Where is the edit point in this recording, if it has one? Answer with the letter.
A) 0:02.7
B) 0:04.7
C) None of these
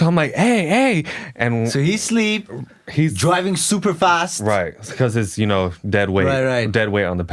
C